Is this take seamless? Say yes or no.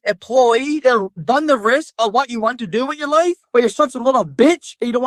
yes